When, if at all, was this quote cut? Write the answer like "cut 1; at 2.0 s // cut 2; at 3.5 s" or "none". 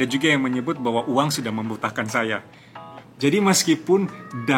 cut 1; at 2.5 s